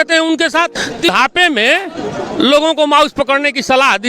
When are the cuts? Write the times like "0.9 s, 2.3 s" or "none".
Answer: 1.1 s

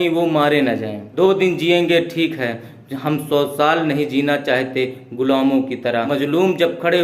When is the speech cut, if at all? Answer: 1.0 s, 6.1 s

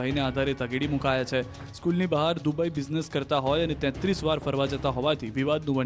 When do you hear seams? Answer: 2.8 s

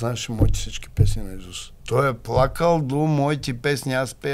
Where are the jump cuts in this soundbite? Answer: 1.7 s

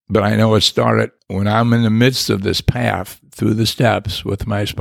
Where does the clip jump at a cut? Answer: 1.2 s

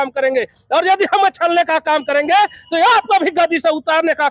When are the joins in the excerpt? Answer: none

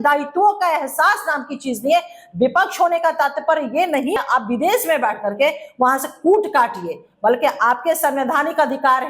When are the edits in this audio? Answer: 4.2 s, 8.0 s

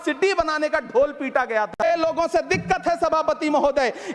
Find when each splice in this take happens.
1.8 s

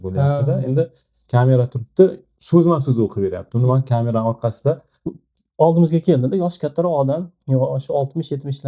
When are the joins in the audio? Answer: 5.2 s

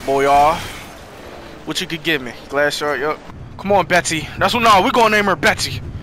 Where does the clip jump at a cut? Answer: 3.3 s

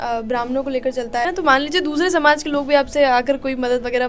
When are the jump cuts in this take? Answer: 1.2 s

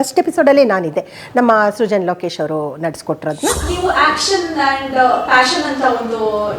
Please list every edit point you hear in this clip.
3.7 s

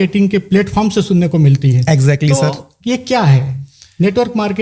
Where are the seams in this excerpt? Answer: none

